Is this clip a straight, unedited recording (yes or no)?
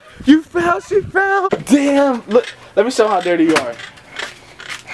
no